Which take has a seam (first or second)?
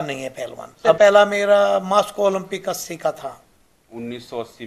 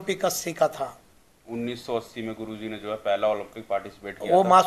first